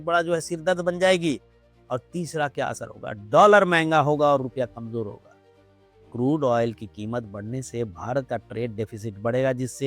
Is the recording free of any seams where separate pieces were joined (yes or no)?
yes